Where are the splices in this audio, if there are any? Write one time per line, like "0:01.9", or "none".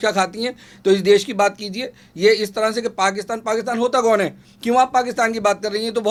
none